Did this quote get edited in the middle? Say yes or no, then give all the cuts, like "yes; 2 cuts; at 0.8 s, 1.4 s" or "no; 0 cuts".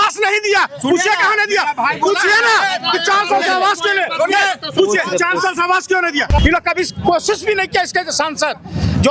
yes; 1 cut; at 6.4 s